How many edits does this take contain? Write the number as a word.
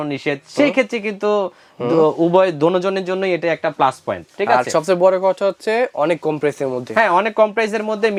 zero